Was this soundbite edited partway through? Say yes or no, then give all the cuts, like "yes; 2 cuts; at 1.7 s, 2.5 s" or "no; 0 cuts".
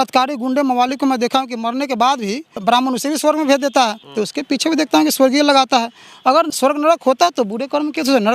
yes; 3 cuts; at 2.6 s, 4.0 s, 6.5 s